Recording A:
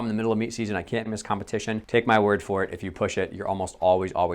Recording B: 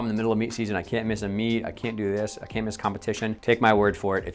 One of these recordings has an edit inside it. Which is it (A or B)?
A